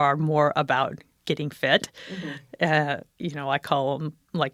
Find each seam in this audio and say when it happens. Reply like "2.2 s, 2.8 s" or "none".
none